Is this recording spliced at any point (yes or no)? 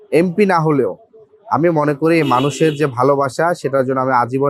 no